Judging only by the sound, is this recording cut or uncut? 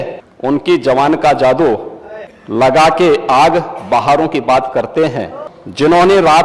uncut